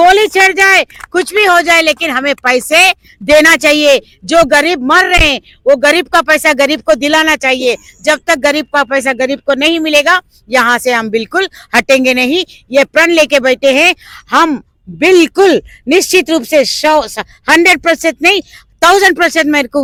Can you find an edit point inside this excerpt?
no; 0 cuts

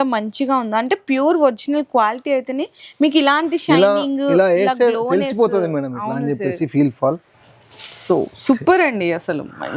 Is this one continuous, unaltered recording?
yes; 0 cuts

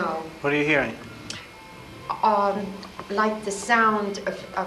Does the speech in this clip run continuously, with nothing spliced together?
yes; 0 cuts

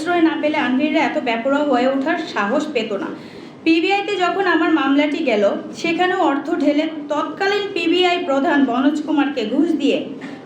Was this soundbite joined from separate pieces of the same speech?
no; 0 cuts

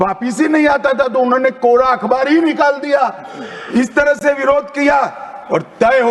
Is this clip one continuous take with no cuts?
yes; 0 cuts

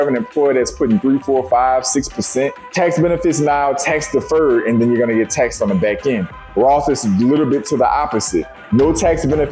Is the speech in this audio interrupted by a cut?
yes; 1 cut; at 2.6 s

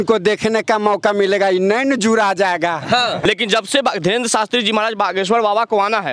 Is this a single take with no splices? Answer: no; 1 cut; at 3.2 s

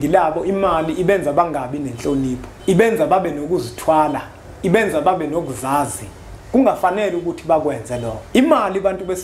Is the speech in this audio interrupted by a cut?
yes; 2 cuts; at 2.5 s, 8.1 s

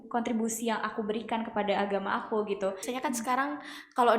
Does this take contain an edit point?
yes; 1 cut; at 2.9 s

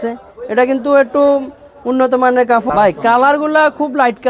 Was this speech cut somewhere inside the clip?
yes; 1 cut; at 2.7 s

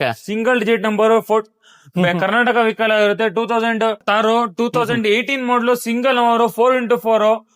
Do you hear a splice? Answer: yes; 1 cut; at 4.0 s

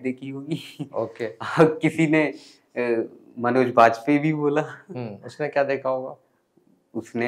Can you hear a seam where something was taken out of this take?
no; 0 cuts

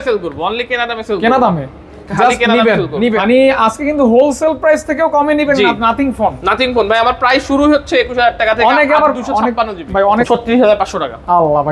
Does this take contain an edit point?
yes; 2 cuts; at 3.2 s, 10.2 s

